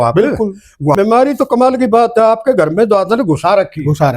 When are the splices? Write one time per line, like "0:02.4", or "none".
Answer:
0:01.0